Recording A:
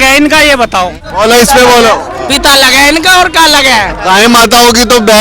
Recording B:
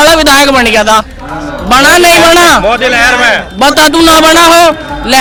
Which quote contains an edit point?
A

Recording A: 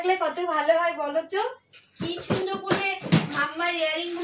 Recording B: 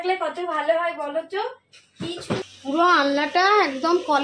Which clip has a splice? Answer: B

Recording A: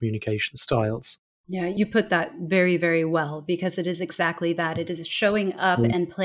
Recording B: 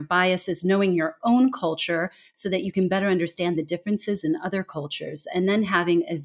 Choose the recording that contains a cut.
A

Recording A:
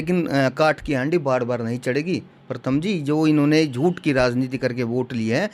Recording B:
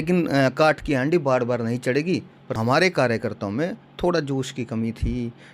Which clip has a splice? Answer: B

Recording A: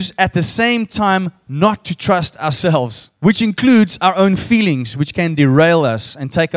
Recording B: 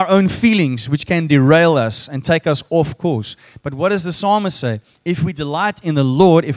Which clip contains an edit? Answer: A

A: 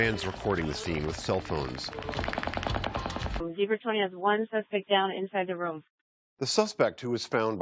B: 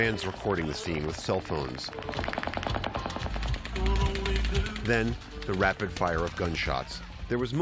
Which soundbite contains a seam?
B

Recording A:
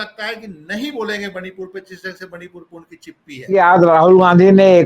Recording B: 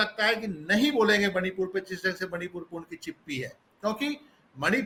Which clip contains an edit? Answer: A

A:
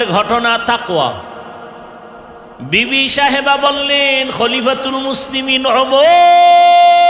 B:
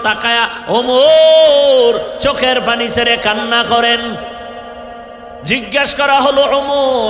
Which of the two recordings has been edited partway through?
B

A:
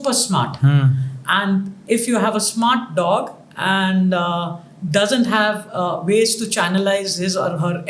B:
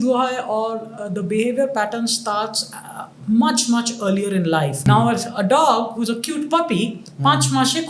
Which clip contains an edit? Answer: B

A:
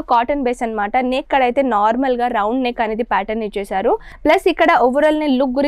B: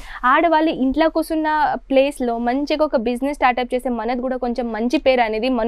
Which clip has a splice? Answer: A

